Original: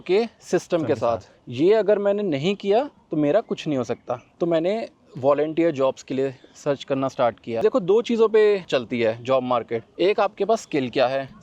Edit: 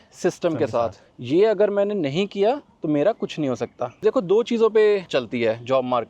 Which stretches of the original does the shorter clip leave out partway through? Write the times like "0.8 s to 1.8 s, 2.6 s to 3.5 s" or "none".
4.3 s to 7.6 s